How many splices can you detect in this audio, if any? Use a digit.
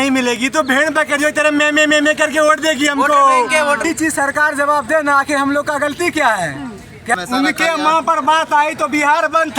2